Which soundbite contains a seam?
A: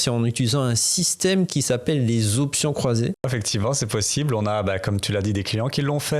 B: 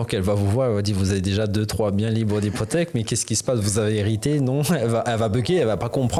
A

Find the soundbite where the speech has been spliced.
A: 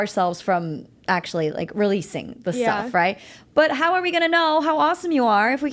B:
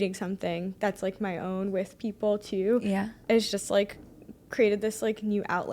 B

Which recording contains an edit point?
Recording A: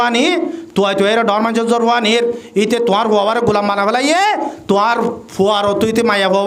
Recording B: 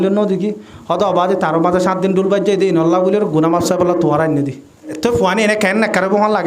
B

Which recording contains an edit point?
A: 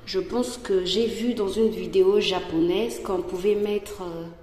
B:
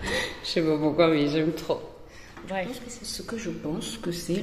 B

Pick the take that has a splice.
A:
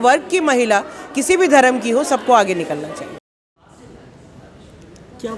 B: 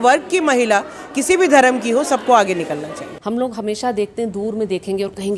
B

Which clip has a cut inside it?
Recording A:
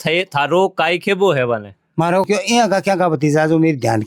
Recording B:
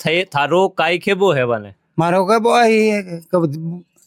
A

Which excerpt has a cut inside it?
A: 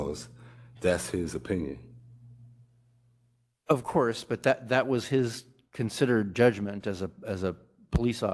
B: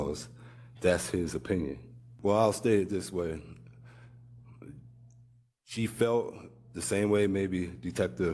B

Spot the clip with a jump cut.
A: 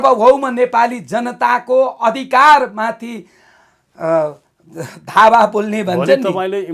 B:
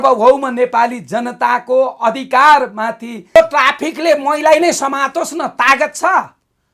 B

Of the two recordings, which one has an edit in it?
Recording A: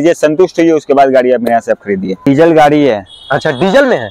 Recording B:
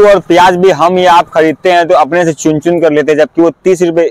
A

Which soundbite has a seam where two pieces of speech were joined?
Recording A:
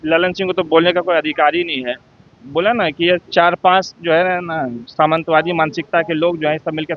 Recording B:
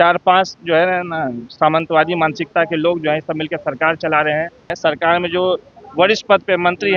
B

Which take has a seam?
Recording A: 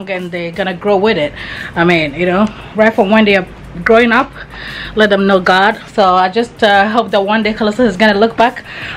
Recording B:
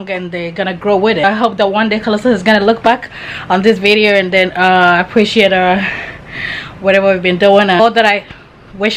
B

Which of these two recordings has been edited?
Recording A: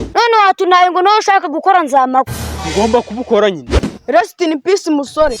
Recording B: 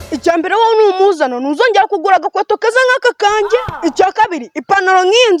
A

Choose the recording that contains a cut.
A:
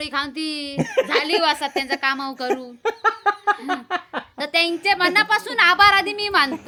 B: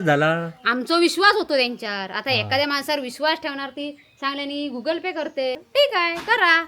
B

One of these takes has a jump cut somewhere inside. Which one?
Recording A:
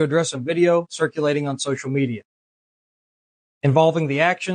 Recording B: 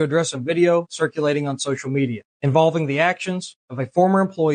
B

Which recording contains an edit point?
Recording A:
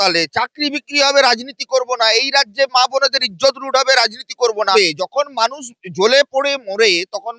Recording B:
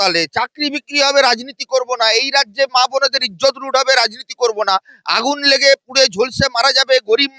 A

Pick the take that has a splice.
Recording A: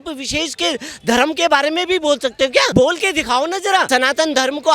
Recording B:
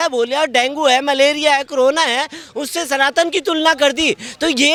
A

